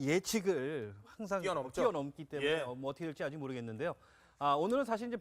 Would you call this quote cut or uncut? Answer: cut